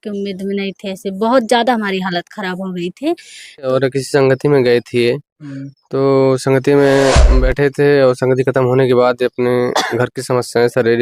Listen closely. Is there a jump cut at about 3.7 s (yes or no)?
yes